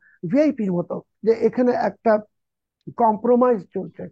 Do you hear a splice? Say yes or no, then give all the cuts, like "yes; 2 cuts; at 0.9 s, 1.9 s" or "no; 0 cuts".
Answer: yes; 1 cut; at 1.0 s